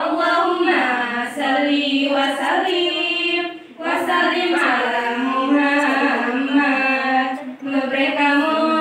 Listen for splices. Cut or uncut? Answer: uncut